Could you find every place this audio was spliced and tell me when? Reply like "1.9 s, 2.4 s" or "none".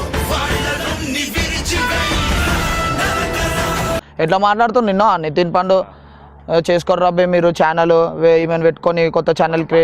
4.1 s

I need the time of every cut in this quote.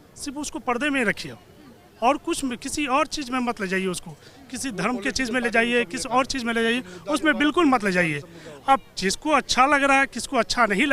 none

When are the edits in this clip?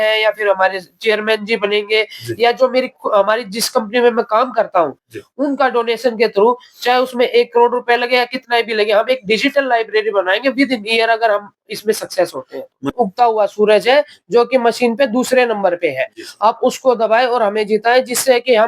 12.9 s

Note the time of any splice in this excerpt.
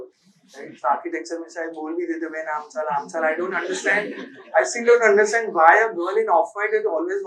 none

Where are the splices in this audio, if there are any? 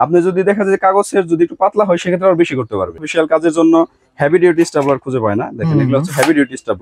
3.0 s

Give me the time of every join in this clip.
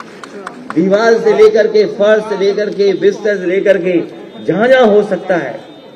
none

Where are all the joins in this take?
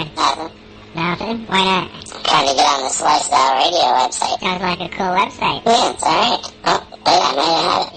none

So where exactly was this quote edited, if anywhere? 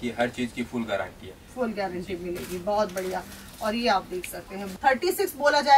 4.6 s

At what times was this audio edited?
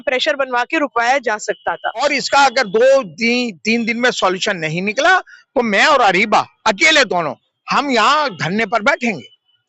2.0 s

